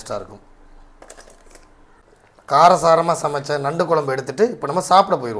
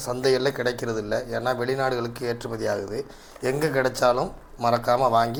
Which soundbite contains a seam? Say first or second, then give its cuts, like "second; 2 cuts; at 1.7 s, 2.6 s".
first; 1 cut; at 2.0 s